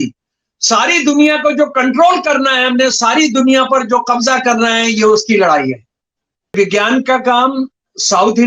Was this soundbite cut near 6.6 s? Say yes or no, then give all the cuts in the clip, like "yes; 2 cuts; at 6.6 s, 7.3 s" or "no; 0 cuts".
yes; 1 cut; at 6.6 s